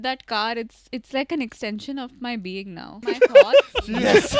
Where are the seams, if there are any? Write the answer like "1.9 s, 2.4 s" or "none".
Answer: 3.0 s